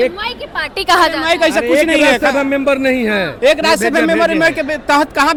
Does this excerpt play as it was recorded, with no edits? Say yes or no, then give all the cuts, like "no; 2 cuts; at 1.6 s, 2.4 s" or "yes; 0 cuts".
yes; 0 cuts